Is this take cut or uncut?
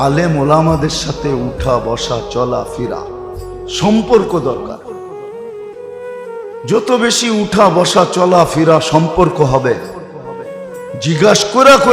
cut